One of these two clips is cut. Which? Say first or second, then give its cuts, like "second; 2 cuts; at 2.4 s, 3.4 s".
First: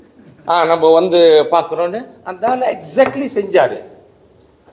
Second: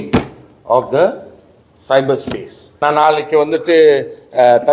second; 1 cut; at 2.7 s